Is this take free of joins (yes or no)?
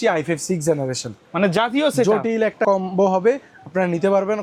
yes